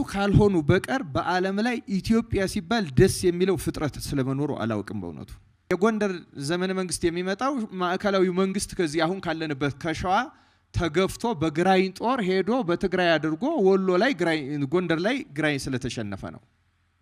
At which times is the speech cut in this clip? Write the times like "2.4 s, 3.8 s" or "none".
5.7 s